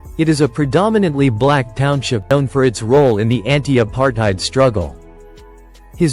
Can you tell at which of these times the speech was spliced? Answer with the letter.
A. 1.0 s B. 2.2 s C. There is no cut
B